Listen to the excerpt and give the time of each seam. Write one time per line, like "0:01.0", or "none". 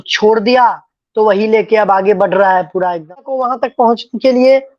0:03.4